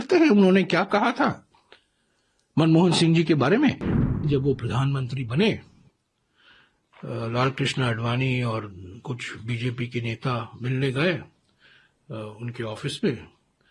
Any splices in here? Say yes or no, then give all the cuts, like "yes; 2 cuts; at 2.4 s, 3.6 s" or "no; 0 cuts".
yes; 1 cut; at 4.0 s